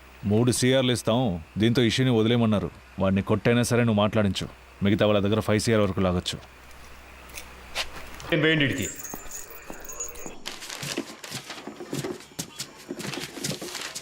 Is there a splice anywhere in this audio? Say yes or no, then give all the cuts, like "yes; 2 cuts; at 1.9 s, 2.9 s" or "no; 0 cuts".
yes; 1 cut; at 8.3 s